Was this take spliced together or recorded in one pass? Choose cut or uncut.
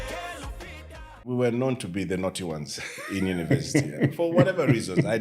cut